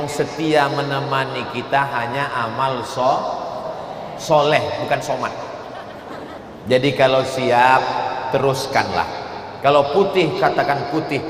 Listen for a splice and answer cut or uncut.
cut